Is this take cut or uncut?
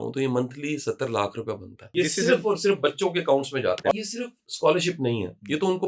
cut